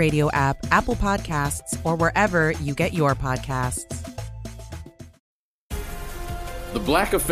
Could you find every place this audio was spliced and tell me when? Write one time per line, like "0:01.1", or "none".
0:05.2